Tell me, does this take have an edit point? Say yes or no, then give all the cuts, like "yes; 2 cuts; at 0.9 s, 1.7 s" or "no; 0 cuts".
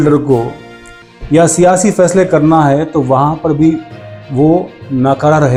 no; 0 cuts